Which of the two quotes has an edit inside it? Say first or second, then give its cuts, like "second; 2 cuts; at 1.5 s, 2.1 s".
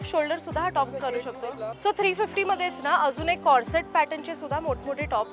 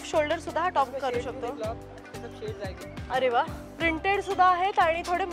first; 1 cut; at 1.7 s